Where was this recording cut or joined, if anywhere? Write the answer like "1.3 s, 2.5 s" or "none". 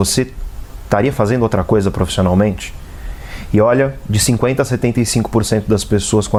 none